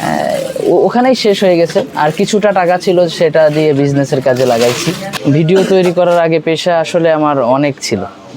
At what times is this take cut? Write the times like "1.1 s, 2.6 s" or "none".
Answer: 5.1 s